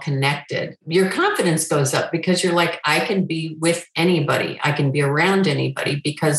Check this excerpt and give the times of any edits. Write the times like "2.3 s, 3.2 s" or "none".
none